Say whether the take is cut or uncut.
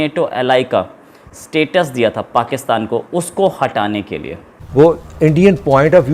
cut